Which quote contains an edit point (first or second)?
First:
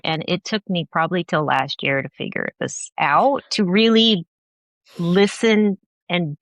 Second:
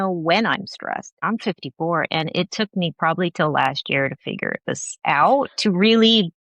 second